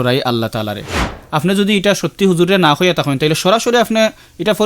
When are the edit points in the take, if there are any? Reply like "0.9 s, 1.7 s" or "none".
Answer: 1.0 s